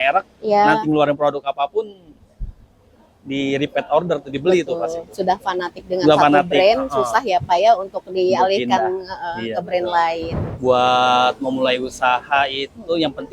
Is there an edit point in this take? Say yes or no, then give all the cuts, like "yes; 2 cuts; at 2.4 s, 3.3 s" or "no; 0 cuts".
yes; 1 cut; at 10.4 s